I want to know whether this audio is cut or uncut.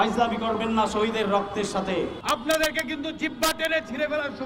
cut